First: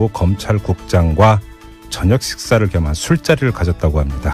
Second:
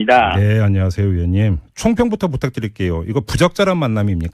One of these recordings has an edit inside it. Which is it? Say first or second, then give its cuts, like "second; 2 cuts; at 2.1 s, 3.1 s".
second; 1 cut; at 2.8 s